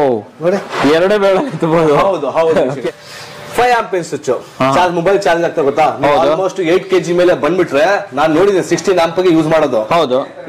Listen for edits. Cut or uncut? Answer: cut